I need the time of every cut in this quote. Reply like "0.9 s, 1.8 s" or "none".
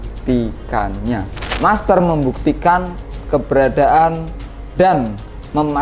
1.4 s